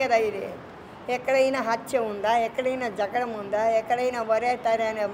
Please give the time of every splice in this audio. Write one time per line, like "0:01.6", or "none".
none